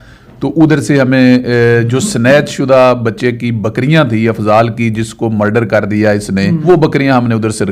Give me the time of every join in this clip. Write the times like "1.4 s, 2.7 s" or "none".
6.6 s